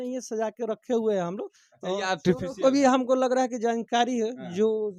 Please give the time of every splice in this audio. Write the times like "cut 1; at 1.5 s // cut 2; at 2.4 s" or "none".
none